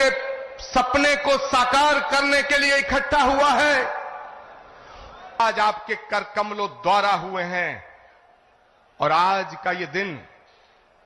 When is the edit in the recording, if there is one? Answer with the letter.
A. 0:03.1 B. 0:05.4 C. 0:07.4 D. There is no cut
B